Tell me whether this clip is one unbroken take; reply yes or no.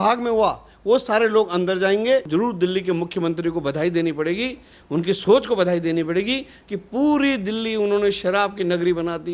no